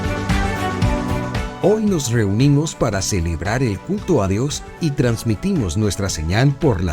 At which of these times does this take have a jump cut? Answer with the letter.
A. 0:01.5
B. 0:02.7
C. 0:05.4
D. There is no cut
A